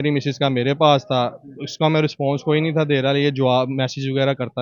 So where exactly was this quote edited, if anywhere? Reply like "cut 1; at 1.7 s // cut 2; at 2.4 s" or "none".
none